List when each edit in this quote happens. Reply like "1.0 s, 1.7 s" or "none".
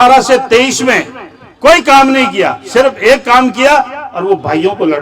none